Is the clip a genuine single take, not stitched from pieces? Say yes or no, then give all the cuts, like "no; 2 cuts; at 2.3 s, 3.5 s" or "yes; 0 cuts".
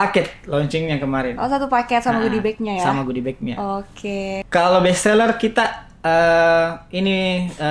no; 1 cut; at 4.4 s